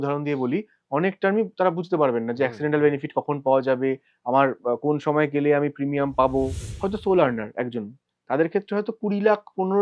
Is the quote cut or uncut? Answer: cut